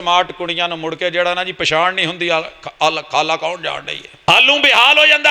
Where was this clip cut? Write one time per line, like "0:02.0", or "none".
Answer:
0:04.3